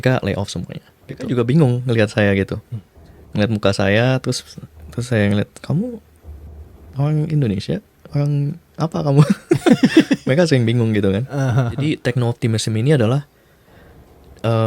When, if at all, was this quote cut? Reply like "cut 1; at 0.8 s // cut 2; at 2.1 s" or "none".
cut 1; at 1.2 s // cut 2; at 11.8 s